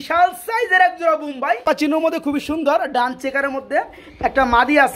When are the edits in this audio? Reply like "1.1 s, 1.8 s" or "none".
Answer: 1.7 s